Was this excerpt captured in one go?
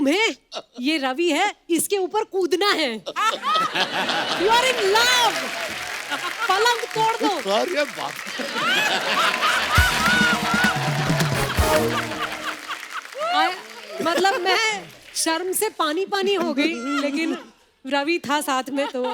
yes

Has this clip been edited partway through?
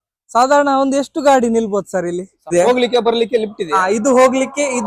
yes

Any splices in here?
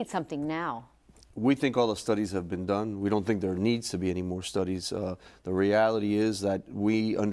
no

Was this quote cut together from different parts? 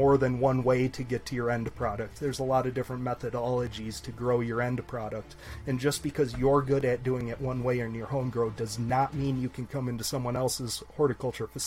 no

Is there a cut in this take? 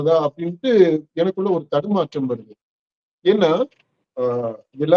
no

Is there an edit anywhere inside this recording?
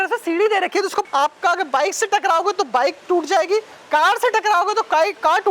yes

